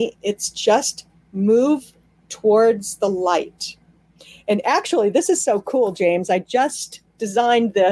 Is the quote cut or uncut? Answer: uncut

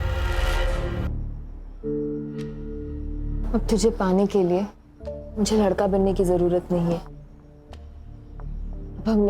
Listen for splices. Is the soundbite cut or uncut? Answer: cut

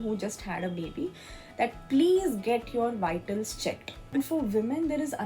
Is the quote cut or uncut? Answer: cut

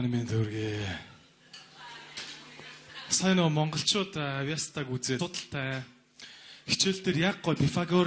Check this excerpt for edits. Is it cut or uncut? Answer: uncut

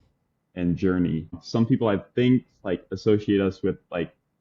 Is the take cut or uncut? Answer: uncut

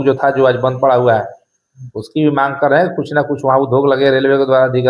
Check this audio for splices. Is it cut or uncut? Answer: uncut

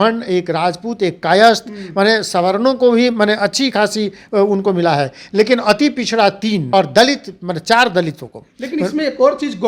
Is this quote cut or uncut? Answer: cut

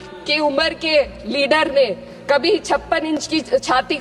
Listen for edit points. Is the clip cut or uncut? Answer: uncut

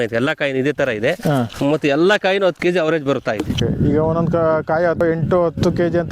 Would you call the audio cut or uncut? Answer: cut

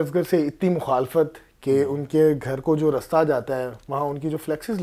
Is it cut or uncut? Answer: uncut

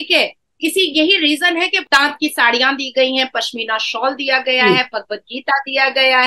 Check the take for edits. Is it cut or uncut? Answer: cut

